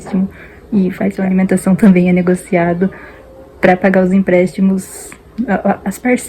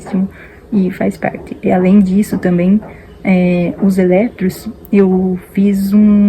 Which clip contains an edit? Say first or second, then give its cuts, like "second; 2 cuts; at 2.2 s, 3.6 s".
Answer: first; 1 cut; at 1.2 s